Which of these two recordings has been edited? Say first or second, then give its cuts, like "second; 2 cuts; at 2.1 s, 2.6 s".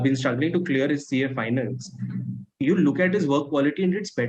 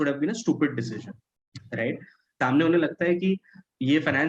second; 1 cut; at 2.4 s